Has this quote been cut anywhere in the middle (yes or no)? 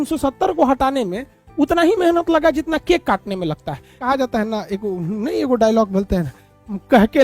yes